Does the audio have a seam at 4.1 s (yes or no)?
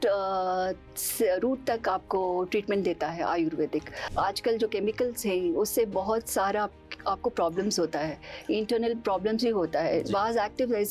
yes